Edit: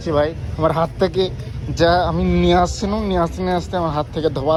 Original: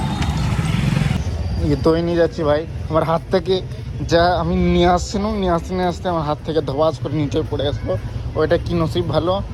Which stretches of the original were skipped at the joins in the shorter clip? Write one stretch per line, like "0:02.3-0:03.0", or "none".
none